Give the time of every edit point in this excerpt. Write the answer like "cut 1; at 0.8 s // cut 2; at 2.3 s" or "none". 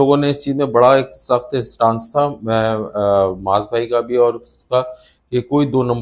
none